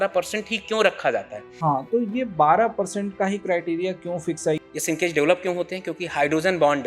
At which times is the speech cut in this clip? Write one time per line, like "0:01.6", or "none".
0:01.5
0:04.6